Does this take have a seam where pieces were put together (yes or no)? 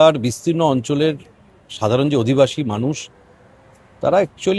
no